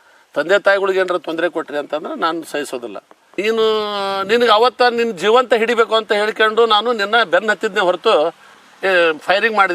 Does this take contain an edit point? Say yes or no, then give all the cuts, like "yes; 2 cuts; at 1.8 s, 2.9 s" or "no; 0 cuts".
yes; 1 cut; at 3.1 s